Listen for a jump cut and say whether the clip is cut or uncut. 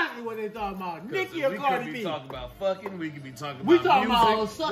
uncut